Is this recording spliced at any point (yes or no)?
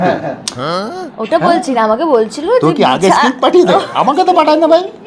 no